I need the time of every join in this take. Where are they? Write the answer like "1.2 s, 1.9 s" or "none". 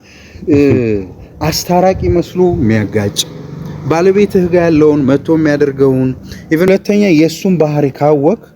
6.7 s